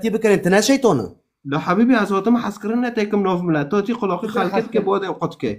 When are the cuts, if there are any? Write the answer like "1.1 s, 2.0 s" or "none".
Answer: 2.2 s